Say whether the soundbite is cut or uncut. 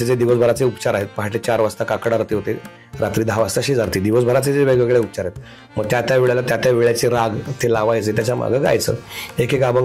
uncut